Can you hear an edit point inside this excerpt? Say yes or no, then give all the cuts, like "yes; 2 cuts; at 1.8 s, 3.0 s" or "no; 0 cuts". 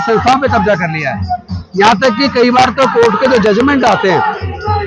no; 0 cuts